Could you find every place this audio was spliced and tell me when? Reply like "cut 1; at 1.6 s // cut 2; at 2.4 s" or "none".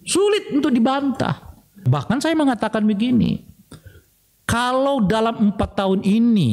cut 1; at 1.9 s